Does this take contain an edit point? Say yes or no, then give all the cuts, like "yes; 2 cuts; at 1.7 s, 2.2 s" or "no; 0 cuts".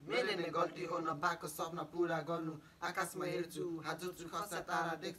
no; 0 cuts